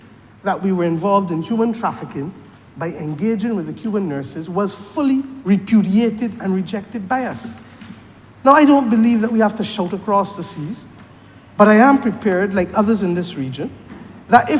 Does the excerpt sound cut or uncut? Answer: uncut